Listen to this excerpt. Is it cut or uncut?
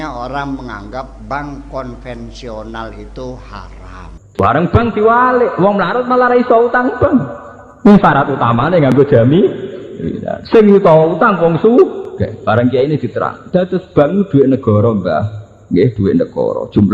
cut